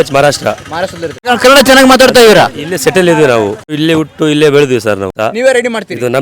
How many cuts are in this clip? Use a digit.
3